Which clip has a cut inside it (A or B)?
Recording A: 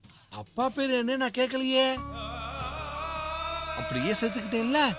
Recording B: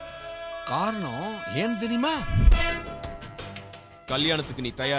B